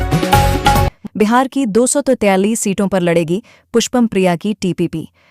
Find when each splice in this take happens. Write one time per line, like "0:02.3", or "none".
0:00.9